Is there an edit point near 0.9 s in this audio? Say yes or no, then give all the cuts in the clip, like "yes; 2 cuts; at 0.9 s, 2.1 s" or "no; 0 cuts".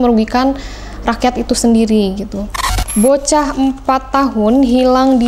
no; 1 cut; at 2.7 s